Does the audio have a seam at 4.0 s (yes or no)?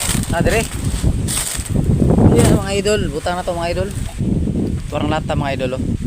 yes